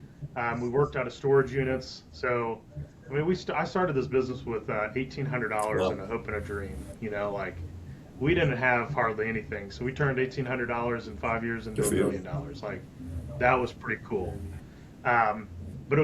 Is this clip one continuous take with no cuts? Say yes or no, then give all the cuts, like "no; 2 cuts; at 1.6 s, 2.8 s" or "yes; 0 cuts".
yes; 0 cuts